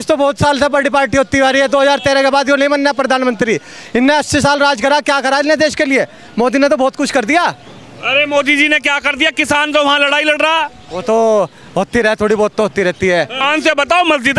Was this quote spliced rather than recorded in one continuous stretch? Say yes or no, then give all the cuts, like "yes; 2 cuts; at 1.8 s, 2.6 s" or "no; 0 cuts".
yes; 1 cut; at 13.3 s